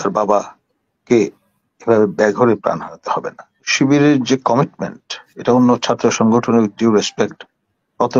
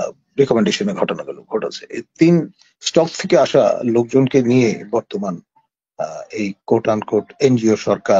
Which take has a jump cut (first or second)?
first